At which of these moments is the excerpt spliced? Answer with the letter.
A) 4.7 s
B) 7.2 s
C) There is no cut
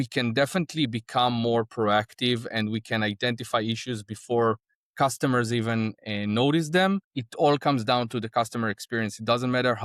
B